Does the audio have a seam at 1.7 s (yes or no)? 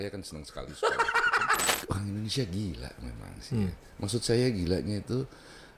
yes